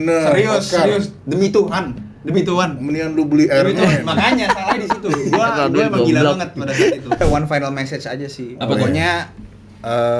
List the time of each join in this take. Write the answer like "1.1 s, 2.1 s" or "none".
7.2 s